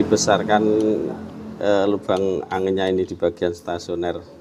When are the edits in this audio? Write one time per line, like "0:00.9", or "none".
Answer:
none

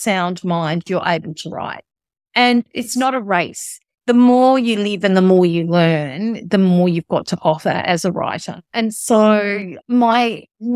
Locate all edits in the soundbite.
0:09.7

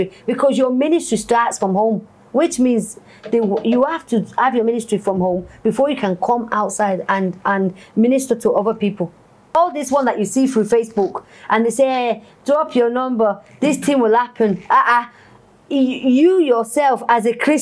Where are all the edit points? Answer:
0:09.5

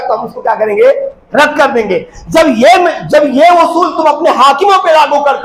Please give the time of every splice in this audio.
none

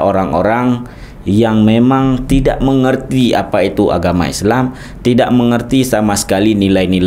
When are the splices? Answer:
none

